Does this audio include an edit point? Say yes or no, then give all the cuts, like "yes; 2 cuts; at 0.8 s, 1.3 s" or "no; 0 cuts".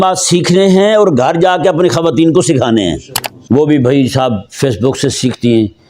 yes; 1 cut; at 3.3 s